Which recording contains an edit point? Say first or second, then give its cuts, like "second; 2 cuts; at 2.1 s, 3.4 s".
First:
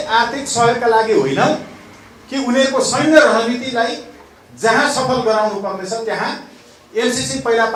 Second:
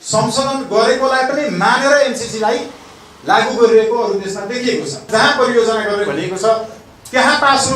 second; 1 cut; at 5.1 s